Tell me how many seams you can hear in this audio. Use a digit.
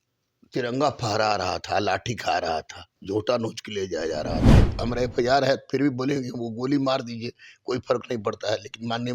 1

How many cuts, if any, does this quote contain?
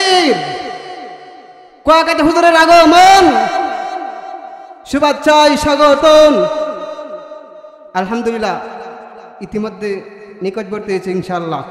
0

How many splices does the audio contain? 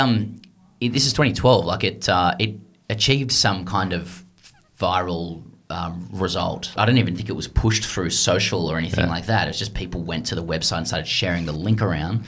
1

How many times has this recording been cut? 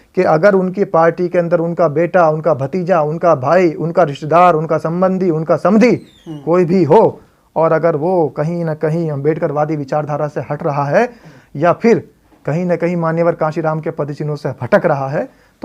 0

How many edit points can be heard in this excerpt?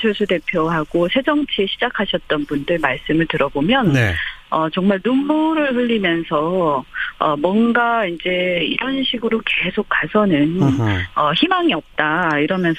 1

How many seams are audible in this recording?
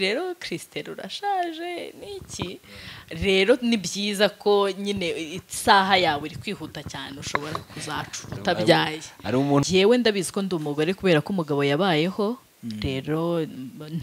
1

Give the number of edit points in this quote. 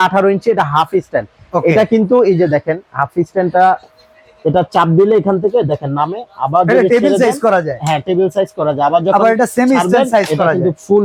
0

